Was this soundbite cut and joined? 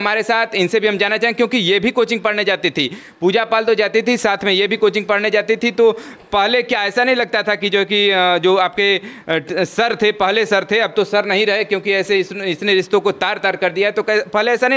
no; 0 cuts

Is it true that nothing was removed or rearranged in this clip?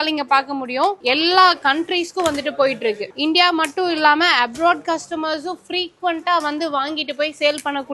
no; 2 cuts; at 1.0 s, 3.1 s

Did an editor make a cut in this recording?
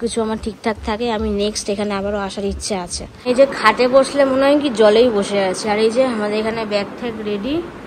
yes; 1 cut; at 3.3 s

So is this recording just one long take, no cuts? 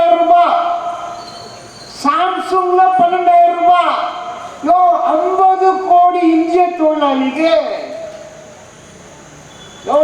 yes; 0 cuts

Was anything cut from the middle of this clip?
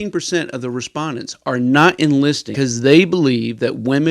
yes; 1 cut; at 2.5 s

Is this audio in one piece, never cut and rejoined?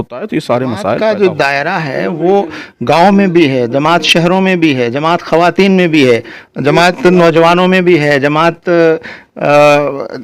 no; 1 cut; at 1.0 s

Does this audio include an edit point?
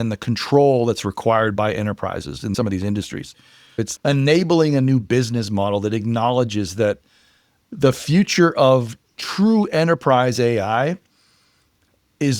yes; 2 cuts; at 2.5 s, 3.7 s

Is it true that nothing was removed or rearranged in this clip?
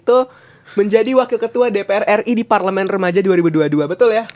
yes; 0 cuts

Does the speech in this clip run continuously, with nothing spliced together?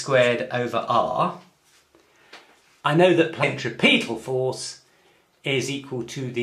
yes; 0 cuts

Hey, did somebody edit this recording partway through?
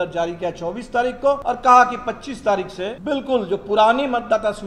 yes; 2 cuts; at 1.4 s, 3.0 s

